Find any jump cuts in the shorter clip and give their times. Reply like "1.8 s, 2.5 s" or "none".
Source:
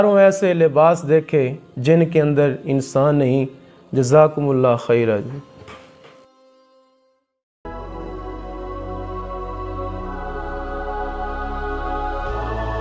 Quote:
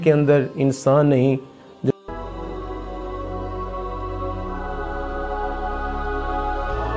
1.9 s